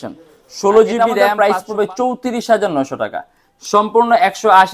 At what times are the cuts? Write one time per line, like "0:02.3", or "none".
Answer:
0:01.3